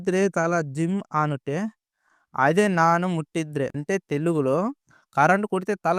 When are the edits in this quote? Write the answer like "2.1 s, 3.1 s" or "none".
3.8 s